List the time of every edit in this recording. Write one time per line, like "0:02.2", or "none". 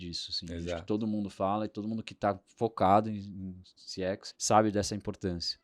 0:04.3